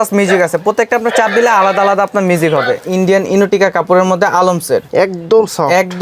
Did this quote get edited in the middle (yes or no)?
yes